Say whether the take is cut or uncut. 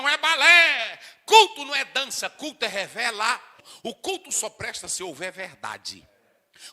cut